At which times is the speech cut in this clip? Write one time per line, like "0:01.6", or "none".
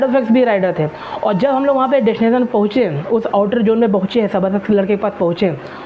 none